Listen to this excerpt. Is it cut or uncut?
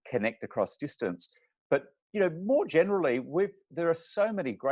uncut